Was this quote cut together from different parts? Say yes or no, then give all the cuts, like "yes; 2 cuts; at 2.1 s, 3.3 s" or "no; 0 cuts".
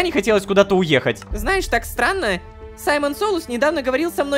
yes; 1 cut; at 1.3 s